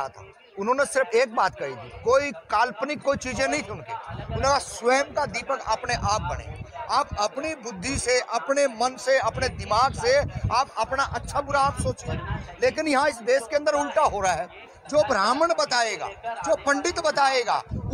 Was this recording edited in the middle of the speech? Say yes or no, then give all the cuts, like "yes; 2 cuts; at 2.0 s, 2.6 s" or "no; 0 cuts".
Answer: no; 0 cuts